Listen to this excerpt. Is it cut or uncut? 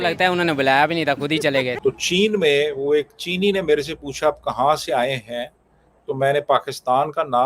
cut